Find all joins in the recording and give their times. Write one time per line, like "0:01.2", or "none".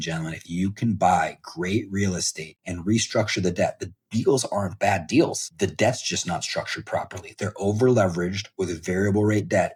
none